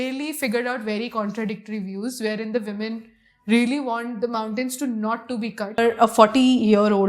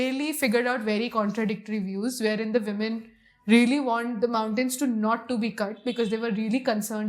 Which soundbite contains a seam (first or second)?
first